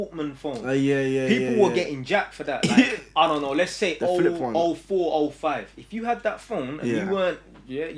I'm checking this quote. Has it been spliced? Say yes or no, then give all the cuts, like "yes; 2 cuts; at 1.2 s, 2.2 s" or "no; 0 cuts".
no; 0 cuts